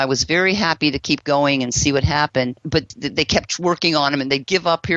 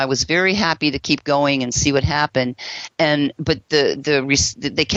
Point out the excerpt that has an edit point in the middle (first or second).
first